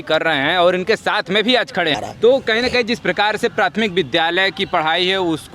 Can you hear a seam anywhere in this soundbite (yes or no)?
yes